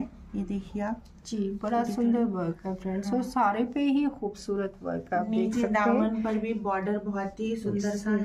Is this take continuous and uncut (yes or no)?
yes